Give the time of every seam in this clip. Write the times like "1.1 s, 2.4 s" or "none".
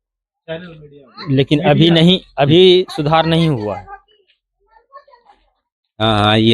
none

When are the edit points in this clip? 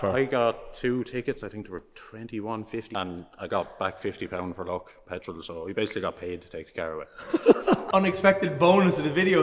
2.9 s, 7.8 s

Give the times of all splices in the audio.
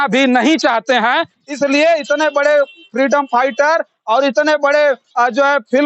1.4 s

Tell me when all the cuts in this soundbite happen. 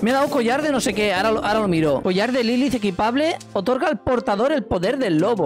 2.0 s

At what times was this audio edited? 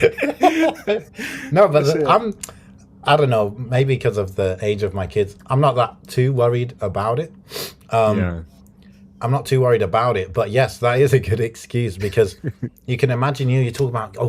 none

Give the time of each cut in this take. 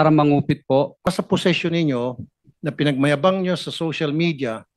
1.1 s

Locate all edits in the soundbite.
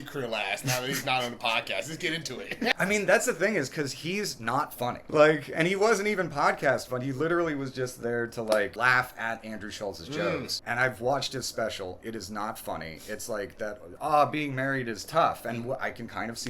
2.7 s, 5.0 s, 8.7 s, 10.6 s, 13.9 s

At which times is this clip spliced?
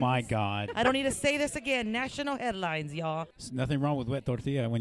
3.0 s

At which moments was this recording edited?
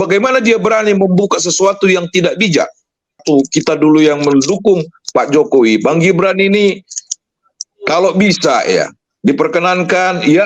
3.2 s

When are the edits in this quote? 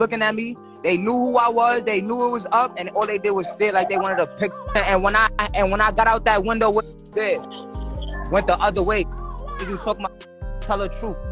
4.7 s

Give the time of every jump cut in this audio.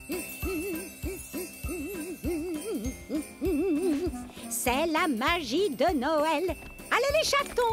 none

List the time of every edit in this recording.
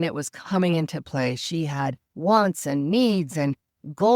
2.1 s

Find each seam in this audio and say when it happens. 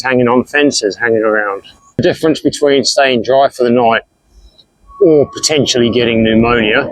2.0 s

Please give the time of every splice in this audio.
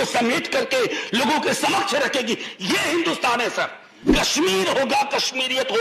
4.1 s

